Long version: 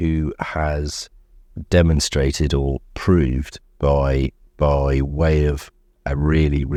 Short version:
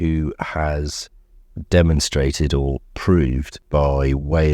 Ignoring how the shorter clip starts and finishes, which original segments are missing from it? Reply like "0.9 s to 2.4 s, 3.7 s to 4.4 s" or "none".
3.5 s to 4.4 s

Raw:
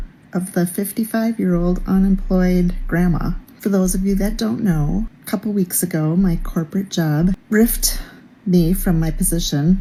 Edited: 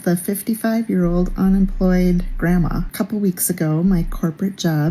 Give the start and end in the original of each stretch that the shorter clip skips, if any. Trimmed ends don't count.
3.4 s to 5.2 s

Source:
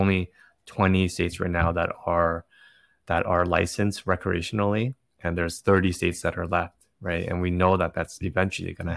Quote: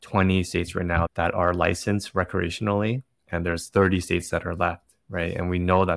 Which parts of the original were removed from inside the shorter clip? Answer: 1.7 s to 3.0 s

